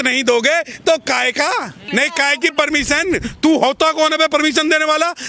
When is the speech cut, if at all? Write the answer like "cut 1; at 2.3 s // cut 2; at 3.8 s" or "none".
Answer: cut 1; at 1.8 s